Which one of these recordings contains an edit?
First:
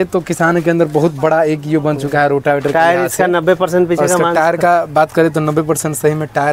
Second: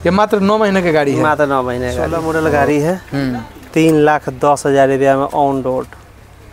second; 1 cut; at 2.1 s

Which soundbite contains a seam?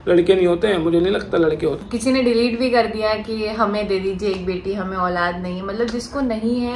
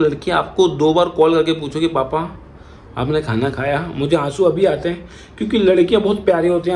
first; 1 cut; at 1.8 s

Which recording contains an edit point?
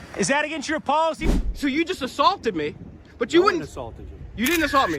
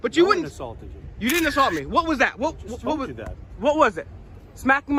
first; 1 cut; at 1.3 s

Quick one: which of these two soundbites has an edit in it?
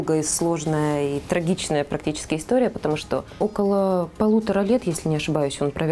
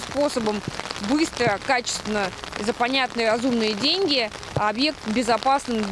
first; 1 cut; at 3.3 s

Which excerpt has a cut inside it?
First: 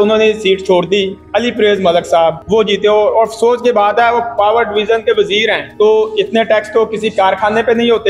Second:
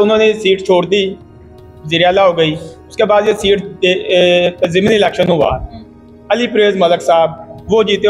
first; 3 cuts; at 1.2 s, 2.4 s, 5.6 s

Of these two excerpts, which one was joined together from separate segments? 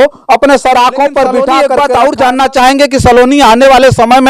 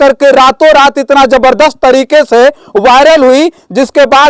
first; 1 cut; at 1.7 s

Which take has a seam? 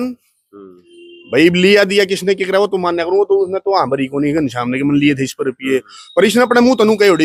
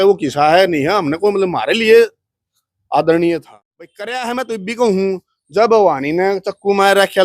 second; 1 cut; at 4.2 s

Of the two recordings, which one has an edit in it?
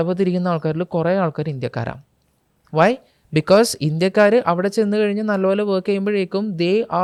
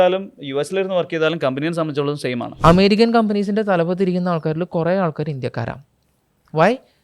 second; 1 cut; at 2.5 s

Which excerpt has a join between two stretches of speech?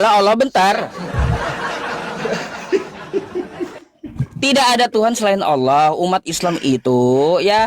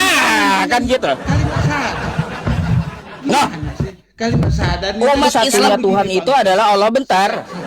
second; 1 cut; at 5.4 s

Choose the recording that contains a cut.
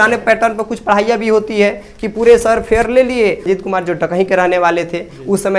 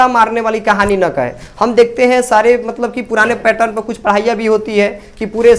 first; 1 cut; at 3.4 s

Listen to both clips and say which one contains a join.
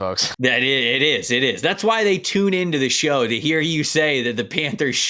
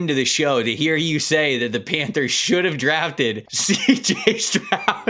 second; 1 cut; at 3.5 s

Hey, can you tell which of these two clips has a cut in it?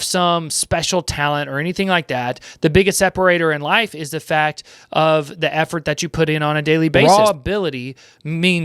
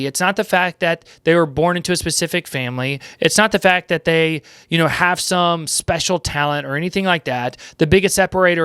first; 1 cut; at 7.0 s

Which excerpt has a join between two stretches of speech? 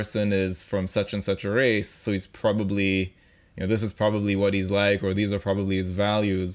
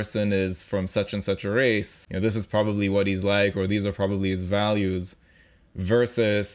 second; 1 cut; at 1.9 s

